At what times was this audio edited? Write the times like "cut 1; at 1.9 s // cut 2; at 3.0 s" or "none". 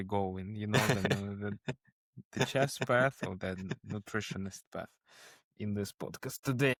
none